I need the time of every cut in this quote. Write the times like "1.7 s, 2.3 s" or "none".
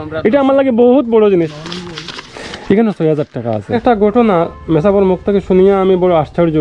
1.3 s, 3.6 s